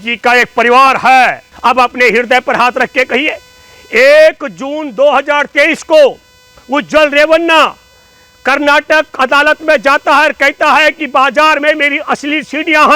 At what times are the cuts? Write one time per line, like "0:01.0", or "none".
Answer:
0:01.5